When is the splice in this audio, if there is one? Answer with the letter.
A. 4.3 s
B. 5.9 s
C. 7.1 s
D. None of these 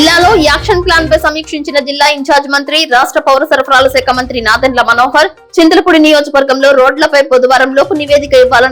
D